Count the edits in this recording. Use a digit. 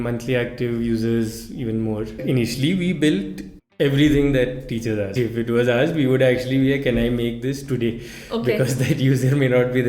2